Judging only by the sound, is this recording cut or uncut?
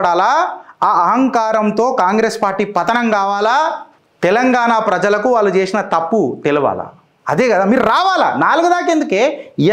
uncut